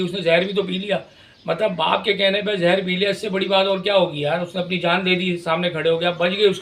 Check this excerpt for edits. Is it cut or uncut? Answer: uncut